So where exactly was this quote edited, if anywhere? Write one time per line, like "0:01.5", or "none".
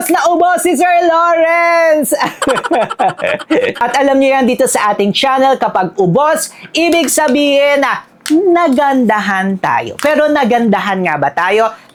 none